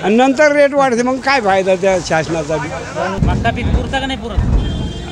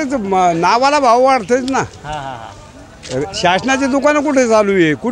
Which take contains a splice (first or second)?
first